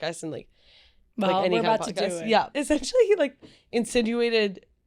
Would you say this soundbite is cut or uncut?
cut